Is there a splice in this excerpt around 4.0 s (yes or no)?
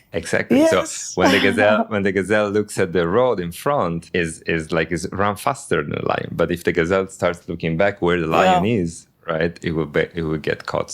yes